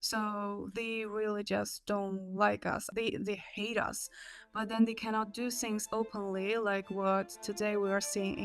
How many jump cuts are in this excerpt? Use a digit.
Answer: 1